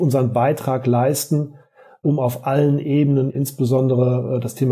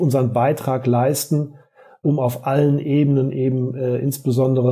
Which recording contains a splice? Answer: first; 1 cut; at 3.3 s

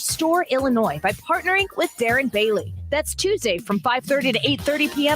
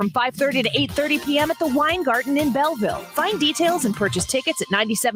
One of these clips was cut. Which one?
first; 1 cut; at 2.8 s

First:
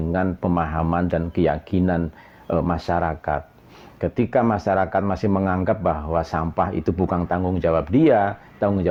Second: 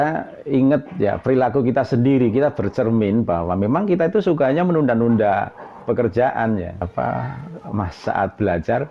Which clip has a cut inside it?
second; 1 cut; at 6.8 s

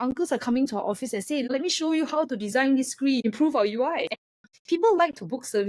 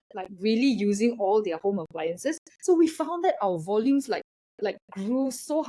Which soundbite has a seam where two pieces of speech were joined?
first; 3 cuts; at 1.5 s, 3.2 s, 4.5 s

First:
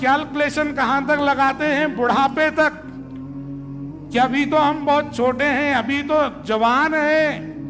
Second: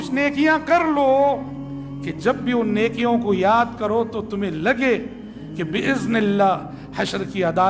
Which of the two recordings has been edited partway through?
first; 2 cuts; at 2.8 s, 4.1 s

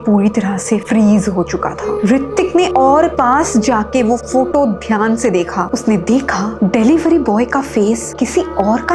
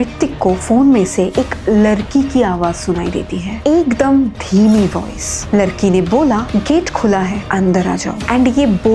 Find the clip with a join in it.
first; 1 cut; at 1.9 s

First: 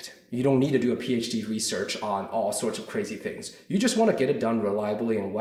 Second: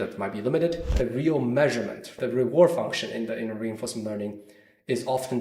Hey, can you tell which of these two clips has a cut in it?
second; 2 cuts; at 0.9 s, 2.1 s

